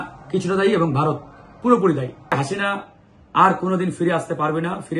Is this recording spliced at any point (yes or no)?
yes